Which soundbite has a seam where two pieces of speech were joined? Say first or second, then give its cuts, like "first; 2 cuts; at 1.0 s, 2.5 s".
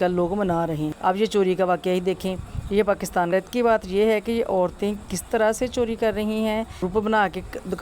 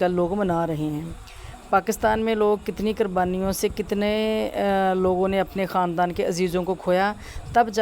first; 3 cuts; at 0.9 s, 3.3 s, 6.9 s